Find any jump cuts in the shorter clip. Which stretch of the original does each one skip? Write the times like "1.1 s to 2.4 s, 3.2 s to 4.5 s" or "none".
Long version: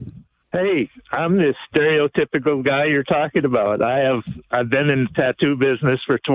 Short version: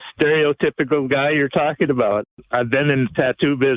3.8 s to 4.2 s